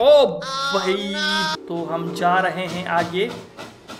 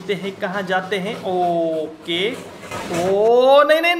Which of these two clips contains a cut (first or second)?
first